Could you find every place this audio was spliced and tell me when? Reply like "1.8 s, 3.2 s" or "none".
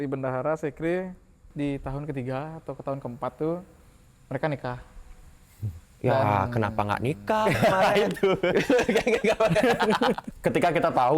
1.5 s, 10.3 s